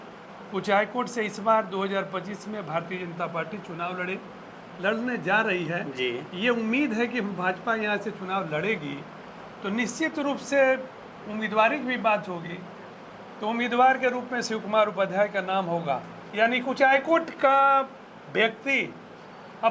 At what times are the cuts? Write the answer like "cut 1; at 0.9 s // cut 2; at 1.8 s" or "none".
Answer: cut 1; at 4.7 s // cut 2; at 16.2 s